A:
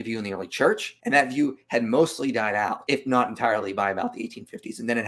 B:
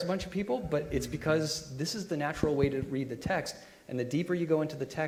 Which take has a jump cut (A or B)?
A